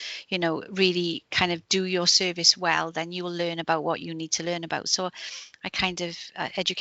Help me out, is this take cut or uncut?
uncut